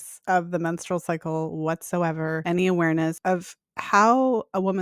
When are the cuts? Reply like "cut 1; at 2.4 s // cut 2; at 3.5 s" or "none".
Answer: cut 1; at 2.4 s // cut 2; at 3.2 s